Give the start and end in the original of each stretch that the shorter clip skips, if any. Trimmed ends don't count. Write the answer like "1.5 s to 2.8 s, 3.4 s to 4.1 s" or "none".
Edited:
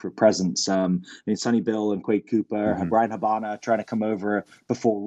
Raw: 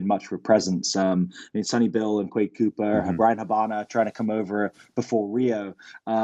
none